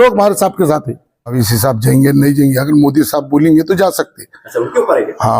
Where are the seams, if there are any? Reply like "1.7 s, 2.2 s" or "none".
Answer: 1.4 s